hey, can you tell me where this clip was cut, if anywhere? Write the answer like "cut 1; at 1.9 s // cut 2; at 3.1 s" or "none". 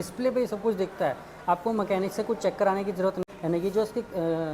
cut 1; at 3.2 s